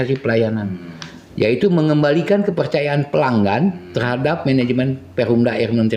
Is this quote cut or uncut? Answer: uncut